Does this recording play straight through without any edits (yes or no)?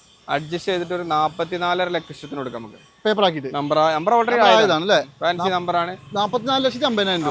yes